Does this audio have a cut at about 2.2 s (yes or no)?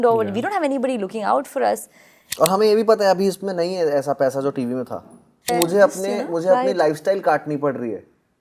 yes